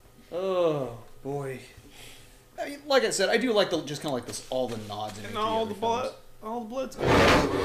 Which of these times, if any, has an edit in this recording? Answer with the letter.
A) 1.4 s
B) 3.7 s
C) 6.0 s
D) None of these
C